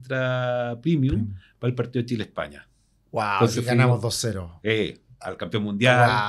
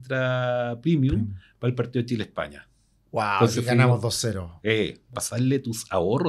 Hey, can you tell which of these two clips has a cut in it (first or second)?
second